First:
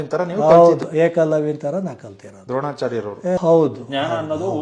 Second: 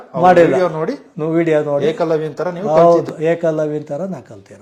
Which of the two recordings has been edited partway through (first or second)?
first